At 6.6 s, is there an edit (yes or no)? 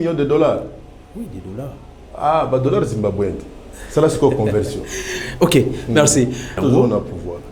yes